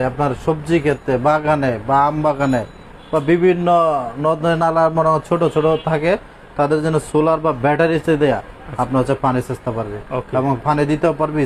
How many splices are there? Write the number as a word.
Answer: zero